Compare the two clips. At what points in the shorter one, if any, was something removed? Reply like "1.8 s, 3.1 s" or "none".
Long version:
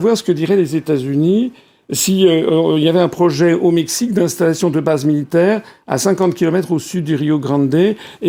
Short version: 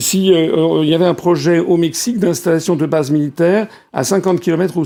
none